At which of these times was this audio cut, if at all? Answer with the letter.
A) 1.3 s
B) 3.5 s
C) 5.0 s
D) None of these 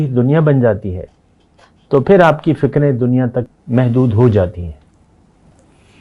B